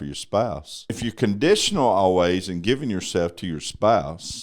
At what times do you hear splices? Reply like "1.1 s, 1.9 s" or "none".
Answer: 0.9 s